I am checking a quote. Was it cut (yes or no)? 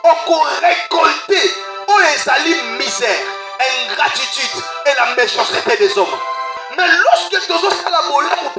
yes